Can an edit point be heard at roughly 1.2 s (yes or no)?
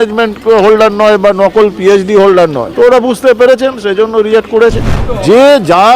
no